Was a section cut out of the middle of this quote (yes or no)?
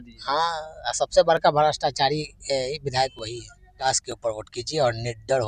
yes